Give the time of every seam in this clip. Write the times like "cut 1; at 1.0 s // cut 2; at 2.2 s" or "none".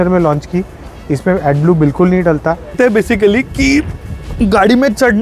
cut 1; at 2.7 s